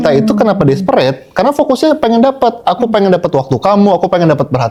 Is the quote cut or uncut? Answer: uncut